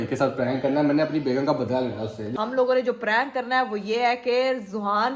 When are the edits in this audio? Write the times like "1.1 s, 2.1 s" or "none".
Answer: 2.4 s